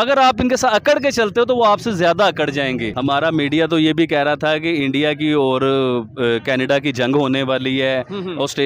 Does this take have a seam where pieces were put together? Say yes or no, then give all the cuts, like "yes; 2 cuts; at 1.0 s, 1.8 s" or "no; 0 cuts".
yes; 1 cut; at 2.9 s